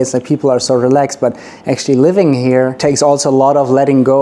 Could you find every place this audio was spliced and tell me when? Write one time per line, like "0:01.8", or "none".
0:02.8